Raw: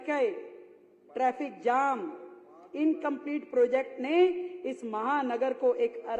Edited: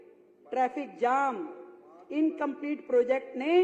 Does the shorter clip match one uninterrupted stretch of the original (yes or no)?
yes